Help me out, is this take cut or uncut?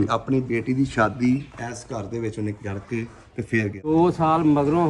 cut